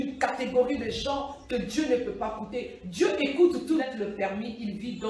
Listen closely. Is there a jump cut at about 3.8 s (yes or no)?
yes